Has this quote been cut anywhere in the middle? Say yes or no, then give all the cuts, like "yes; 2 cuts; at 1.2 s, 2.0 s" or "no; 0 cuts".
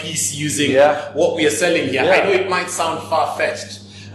no; 0 cuts